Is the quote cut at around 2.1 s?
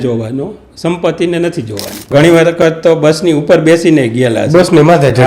yes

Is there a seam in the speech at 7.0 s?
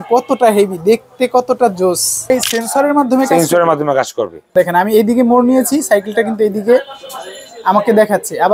no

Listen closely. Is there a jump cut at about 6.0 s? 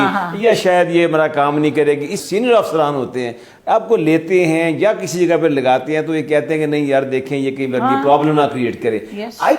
no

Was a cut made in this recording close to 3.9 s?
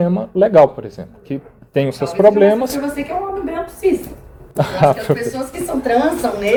no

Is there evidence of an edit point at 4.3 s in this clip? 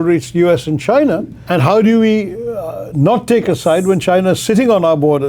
no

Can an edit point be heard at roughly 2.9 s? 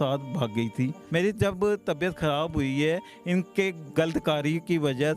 no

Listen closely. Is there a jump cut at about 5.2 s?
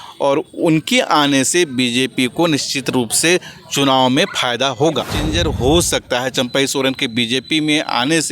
yes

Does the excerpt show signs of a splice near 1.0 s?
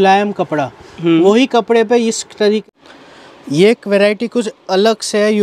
no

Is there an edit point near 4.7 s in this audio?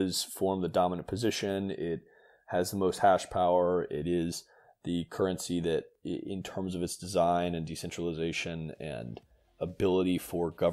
no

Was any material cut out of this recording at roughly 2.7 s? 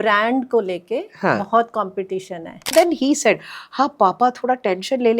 yes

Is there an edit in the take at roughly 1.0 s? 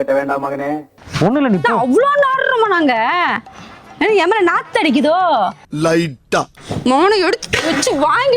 yes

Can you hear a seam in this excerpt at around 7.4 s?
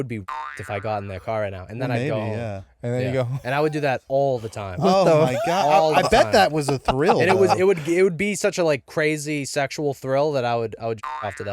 no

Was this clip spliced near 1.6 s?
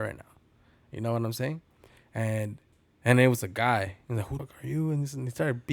no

